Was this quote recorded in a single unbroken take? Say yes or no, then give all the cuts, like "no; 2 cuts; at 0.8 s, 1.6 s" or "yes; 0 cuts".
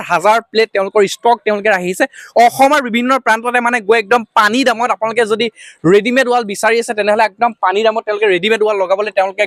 yes; 0 cuts